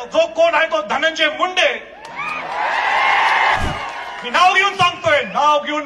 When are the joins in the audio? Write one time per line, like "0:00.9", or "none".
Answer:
0:03.6